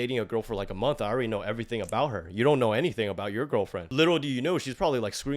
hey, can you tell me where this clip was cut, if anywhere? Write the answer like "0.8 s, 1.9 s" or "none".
3.8 s